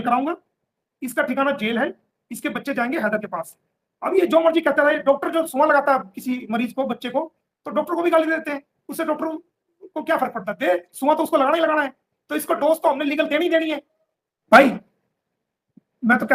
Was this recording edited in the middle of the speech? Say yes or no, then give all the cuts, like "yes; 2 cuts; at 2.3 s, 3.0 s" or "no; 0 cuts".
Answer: no; 0 cuts